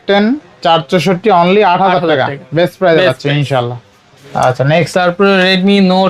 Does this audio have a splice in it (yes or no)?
no